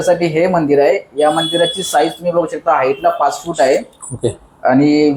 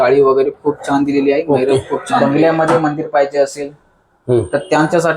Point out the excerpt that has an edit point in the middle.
second; 1 cut; at 2.2 s

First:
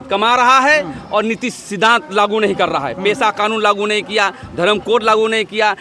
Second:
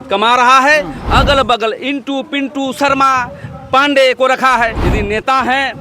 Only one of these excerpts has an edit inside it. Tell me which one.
second; 2 cuts; at 1.0 s, 4.8 s

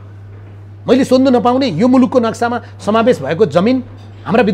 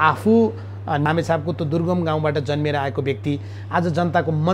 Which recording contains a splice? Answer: second; 1 cut; at 1.1 s

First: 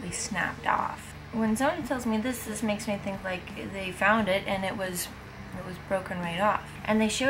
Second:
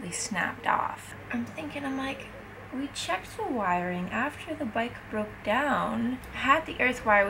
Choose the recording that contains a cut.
second; 2 cuts; at 1.1 s, 6.3 s

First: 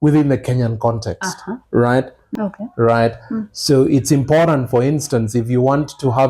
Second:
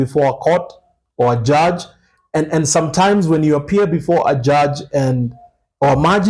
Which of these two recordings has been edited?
first; 1 cut; at 2.2 s

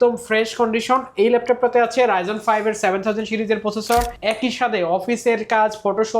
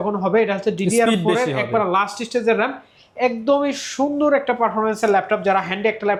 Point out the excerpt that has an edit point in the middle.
first; 1 cut; at 4.1 s

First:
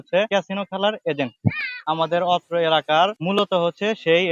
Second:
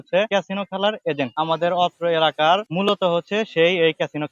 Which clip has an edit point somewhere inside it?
second; 1 cut; at 1.3 s

